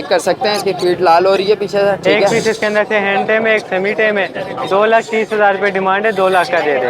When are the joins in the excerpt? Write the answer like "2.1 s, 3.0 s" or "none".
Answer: 2.3 s